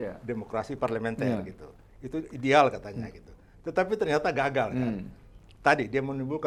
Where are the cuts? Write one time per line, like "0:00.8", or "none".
none